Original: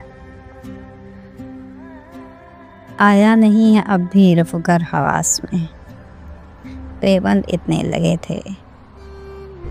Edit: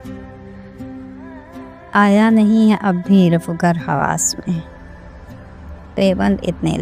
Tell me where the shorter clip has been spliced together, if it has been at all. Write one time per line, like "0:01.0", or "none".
0:01.8